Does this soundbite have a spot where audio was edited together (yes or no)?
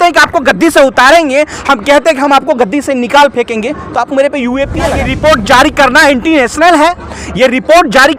yes